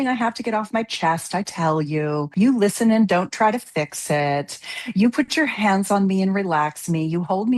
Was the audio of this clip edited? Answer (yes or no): yes